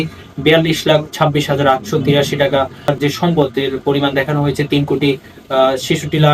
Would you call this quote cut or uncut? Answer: cut